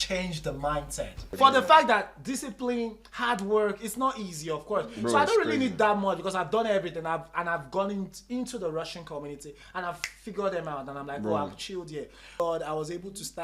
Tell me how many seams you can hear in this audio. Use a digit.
2